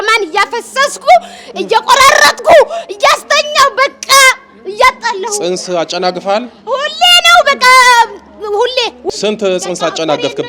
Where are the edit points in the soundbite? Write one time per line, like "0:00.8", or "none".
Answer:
0:09.0